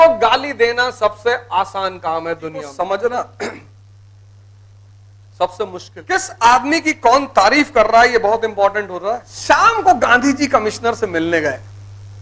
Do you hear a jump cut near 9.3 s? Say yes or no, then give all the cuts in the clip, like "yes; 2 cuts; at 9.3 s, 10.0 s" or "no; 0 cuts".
yes; 3 cuts; at 2.7 s, 5.9 s, 9.3 s